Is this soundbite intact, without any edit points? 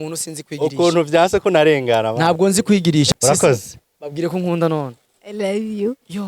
no; 1 cut; at 3.1 s

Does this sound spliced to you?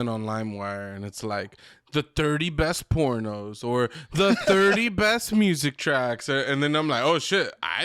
no; 0 cuts

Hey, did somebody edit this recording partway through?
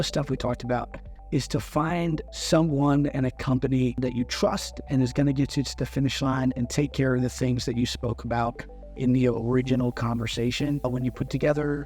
yes; 3 cuts; at 2.3 s, 4.0 s, 10.8 s

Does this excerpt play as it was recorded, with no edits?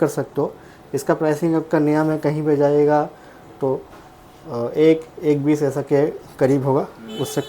yes; 0 cuts

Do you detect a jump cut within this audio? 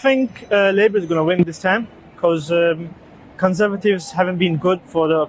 no; 0 cuts

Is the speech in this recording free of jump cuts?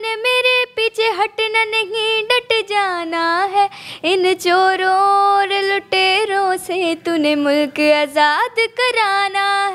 yes; 0 cuts

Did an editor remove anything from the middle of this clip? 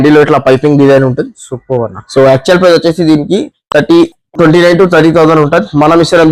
no; 0 cuts

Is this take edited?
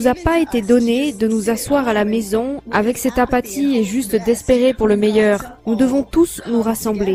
no; 0 cuts

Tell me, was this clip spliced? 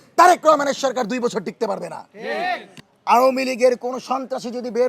yes; 1 cut; at 2.8 s

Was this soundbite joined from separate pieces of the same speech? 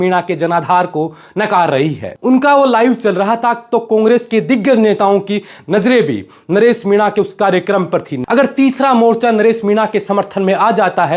yes; 2 cuts; at 2.1 s, 8.1 s

